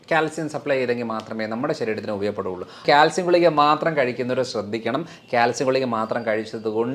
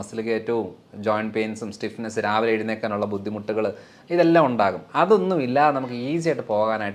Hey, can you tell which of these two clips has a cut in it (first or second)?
first